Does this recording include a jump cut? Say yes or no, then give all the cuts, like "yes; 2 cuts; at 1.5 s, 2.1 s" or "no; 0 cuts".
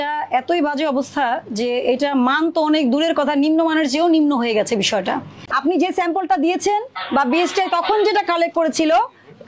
yes; 1 cut; at 5.5 s